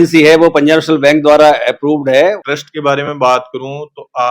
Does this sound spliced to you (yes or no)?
yes